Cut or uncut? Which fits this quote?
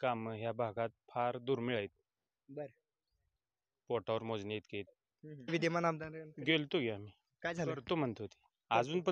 cut